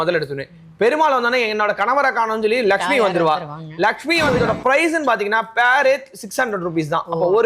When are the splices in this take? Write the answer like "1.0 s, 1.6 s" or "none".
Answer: 4.3 s